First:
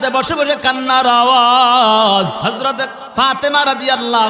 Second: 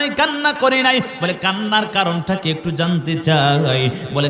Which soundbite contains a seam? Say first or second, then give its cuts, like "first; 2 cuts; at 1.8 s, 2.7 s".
first; 1 cut; at 2.4 s